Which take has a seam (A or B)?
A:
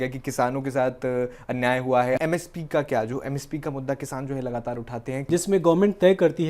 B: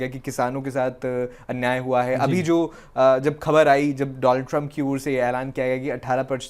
A